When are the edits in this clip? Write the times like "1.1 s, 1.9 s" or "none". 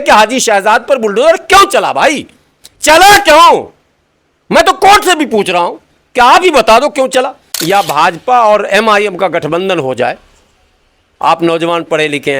7.4 s